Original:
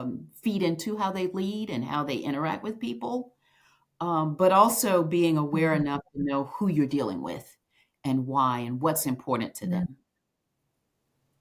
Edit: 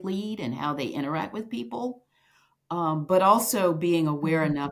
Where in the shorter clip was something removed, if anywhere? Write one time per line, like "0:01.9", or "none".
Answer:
none